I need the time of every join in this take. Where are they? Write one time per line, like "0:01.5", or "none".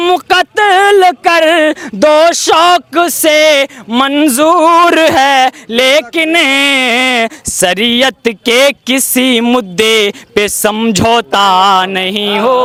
none